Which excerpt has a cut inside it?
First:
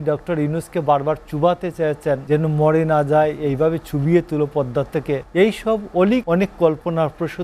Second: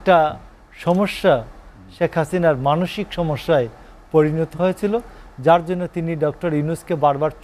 first; 3 cuts; at 2.2 s, 5.2 s, 6.2 s

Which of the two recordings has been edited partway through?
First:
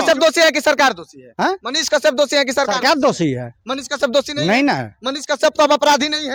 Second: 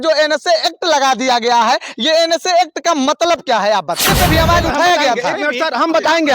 second; 1 cut; at 4.0 s

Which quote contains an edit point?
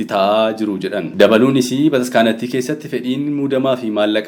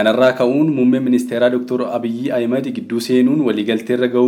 first; 1 cut; at 1.1 s

